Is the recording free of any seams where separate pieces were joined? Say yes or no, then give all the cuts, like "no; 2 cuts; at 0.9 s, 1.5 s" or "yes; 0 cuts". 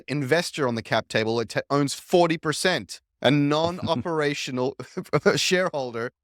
yes; 0 cuts